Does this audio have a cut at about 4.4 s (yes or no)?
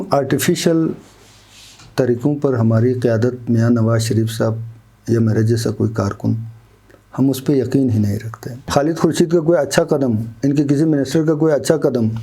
no